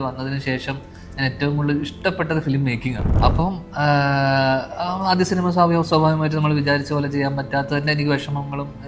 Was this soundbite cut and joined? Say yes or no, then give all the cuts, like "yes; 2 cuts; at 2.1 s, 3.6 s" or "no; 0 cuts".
yes; 1 cut; at 3.1 s